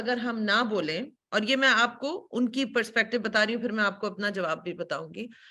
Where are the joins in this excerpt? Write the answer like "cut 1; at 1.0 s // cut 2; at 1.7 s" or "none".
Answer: none